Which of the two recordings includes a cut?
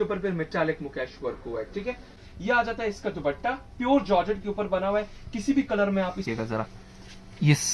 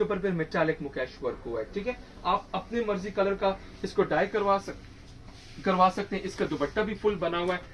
first; 2 cuts; at 2.2 s, 6.3 s

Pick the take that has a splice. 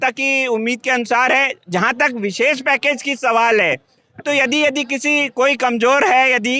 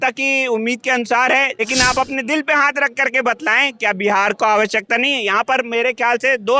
second; 1 cut; at 1.5 s

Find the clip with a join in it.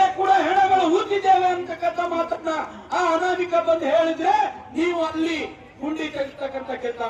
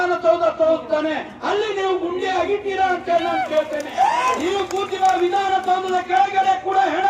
second; 1 cut; at 4.3 s

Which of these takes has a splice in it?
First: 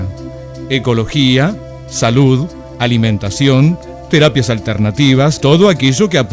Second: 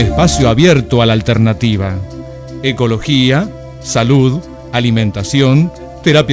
first; 1 cut; at 5.4 s

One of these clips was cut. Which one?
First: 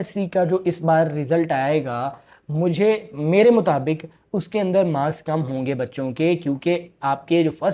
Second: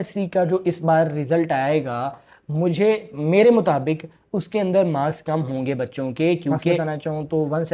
second; 1 cut; at 6.8 s

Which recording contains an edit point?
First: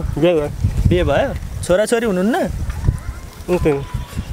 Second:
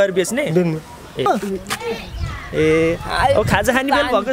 second; 1 cut; at 1.3 s

